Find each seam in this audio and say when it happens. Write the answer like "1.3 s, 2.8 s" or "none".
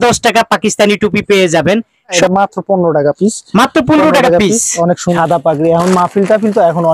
2.1 s, 5.2 s